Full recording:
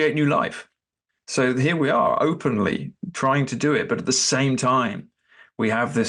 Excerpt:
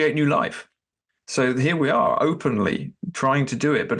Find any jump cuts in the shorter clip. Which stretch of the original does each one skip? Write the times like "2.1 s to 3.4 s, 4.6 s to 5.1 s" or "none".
none